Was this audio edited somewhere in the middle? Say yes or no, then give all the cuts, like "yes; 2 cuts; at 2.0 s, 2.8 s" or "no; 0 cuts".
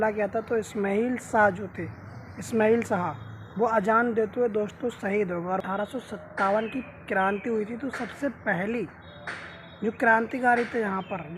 yes; 1 cut; at 5.6 s